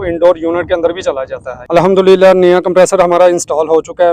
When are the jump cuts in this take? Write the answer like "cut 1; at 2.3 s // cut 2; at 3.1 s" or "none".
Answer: cut 1; at 1.6 s

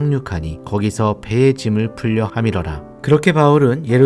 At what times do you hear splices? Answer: none

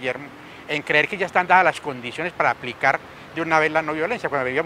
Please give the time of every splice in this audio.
cut 1; at 1.4 s

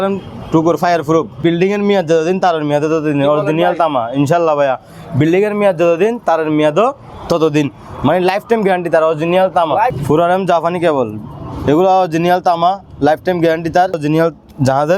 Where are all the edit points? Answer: cut 1; at 1.4 s // cut 2; at 9.9 s // cut 3; at 14.0 s

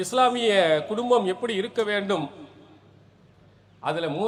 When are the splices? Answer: none

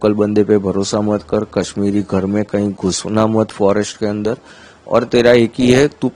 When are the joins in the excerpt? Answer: none

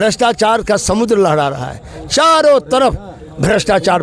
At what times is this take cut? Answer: none

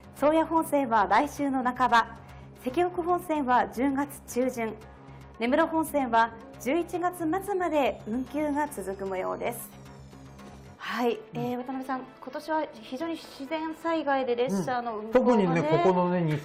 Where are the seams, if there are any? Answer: cut 1; at 8.1 s

